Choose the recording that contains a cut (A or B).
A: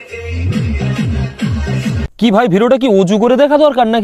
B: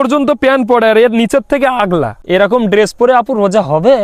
B